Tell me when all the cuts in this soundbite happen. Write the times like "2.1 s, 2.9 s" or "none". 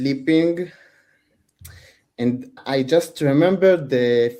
2.5 s